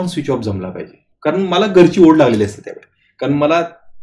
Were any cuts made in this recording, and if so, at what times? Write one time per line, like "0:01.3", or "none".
0:01.0